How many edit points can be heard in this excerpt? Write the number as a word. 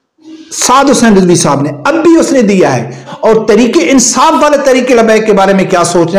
one